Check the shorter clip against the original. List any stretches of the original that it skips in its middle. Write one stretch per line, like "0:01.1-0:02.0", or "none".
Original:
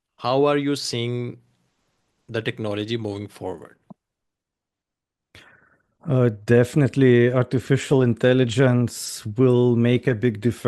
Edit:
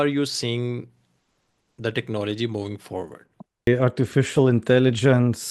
0:04.2-0:07.2